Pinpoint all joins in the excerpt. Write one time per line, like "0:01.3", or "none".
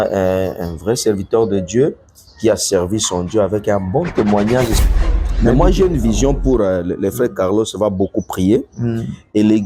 0:05.0